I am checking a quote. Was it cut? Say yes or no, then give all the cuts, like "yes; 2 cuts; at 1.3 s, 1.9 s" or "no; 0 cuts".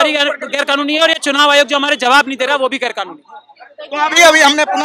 no; 0 cuts